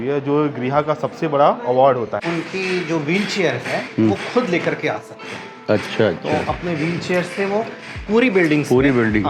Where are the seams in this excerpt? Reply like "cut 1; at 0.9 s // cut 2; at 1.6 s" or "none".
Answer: cut 1; at 2.2 s